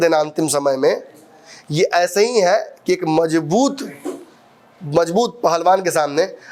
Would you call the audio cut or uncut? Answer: uncut